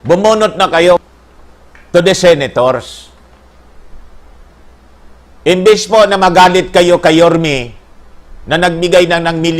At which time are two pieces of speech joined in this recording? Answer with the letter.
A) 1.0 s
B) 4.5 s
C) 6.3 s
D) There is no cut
A